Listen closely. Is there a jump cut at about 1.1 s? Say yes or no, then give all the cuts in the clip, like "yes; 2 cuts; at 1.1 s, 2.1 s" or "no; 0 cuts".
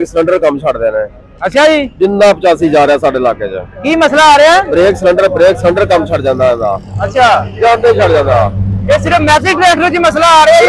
no; 0 cuts